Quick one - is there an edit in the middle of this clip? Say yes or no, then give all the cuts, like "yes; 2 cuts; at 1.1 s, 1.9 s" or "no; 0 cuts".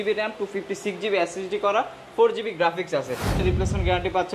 yes; 1 cut; at 3.4 s